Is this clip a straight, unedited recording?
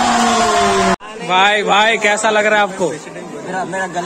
no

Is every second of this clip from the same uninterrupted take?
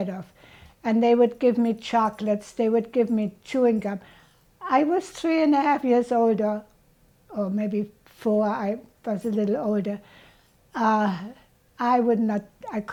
yes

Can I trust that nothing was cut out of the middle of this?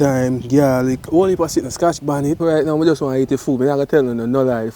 no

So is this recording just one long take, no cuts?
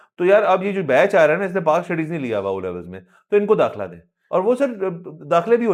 yes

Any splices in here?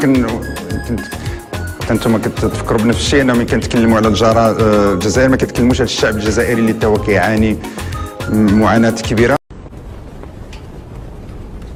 no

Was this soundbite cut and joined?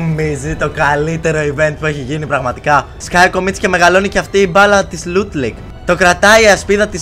yes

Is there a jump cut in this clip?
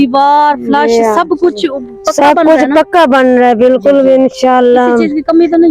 no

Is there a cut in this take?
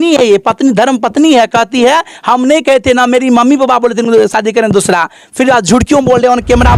no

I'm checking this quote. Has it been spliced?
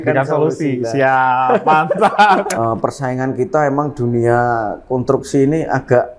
yes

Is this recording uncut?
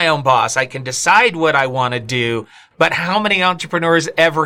yes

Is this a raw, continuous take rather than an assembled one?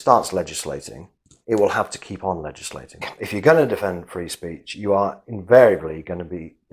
no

